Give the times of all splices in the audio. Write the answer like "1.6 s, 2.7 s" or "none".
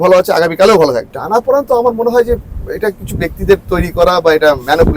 1.1 s